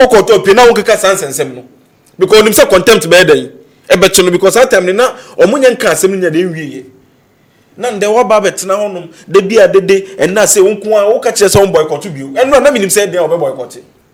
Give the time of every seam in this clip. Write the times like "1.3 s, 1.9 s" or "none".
none